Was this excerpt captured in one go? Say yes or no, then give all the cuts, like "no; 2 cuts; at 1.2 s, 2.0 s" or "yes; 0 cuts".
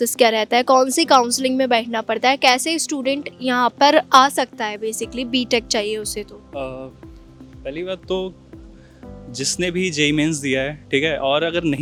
yes; 0 cuts